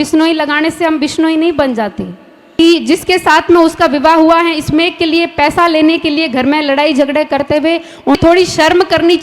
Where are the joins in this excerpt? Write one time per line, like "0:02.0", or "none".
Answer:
0:02.6
0:08.2